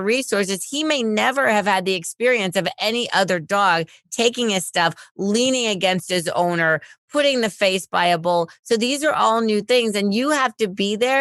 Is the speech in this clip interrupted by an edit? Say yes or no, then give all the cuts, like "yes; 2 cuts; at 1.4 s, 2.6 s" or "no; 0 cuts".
no; 0 cuts